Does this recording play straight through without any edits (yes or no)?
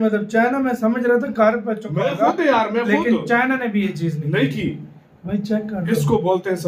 yes